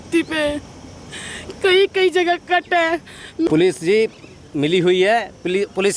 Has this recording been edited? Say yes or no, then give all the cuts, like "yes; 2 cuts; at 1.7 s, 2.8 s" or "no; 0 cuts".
yes; 1 cut; at 3.5 s